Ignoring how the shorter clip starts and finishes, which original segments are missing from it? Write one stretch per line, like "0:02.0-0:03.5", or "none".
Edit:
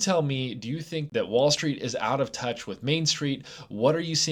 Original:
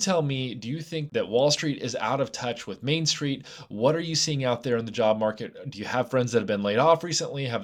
none